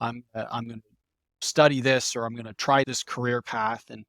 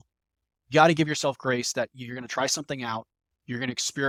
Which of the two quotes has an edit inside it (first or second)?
first